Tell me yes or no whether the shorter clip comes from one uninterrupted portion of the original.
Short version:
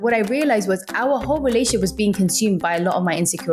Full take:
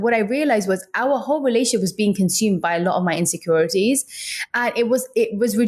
yes